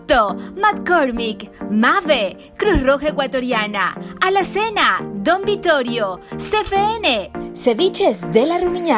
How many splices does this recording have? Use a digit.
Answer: 0